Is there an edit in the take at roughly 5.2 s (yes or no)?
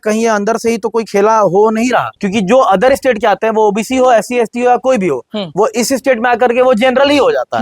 no